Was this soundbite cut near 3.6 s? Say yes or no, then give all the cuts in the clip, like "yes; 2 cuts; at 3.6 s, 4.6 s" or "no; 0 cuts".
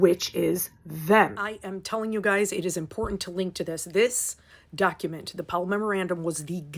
no; 1 cut; at 1.6 s